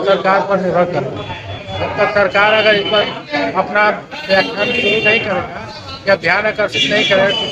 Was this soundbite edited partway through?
no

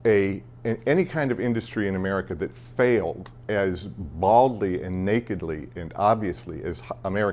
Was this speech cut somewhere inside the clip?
no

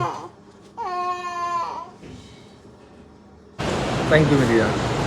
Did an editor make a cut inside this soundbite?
yes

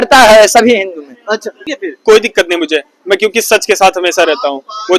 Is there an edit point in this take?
yes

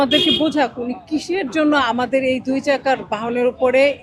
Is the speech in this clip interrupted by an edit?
no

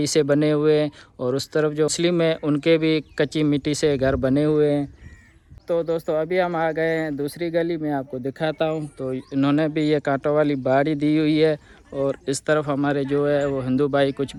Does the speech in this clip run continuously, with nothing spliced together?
yes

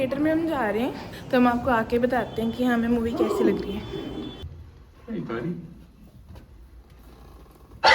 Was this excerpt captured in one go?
no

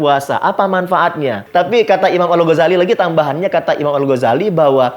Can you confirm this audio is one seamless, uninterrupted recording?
no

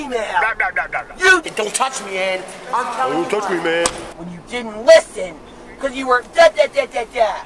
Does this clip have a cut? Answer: yes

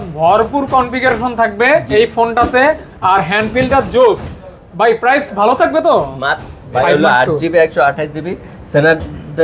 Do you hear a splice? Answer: yes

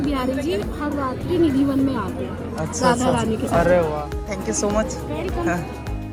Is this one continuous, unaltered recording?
yes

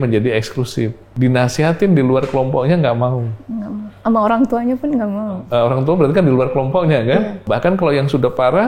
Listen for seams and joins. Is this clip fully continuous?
no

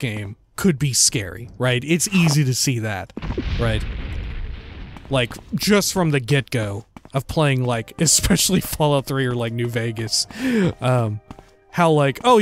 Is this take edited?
no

